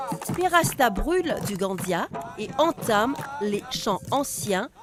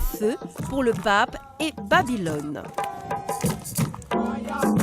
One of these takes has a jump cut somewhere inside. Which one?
second; 1 cut; at 1.8 s

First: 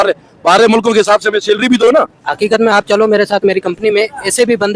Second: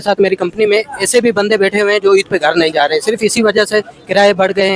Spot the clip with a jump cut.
first; 1 cut; at 2.2 s

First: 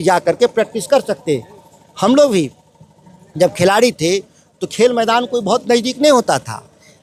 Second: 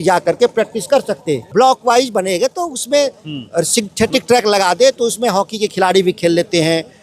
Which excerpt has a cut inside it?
second; 1 cut; at 1.4 s

